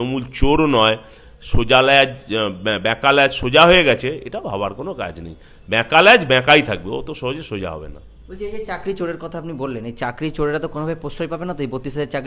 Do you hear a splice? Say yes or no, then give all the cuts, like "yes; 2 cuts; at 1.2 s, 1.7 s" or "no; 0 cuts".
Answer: no; 0 cuts